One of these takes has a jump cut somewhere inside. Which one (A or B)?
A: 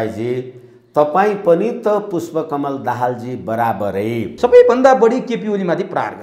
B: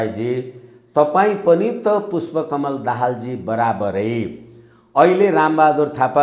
A